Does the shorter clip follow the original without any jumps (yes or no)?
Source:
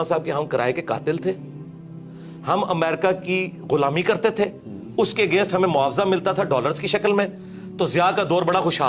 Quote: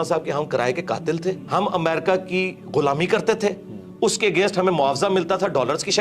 no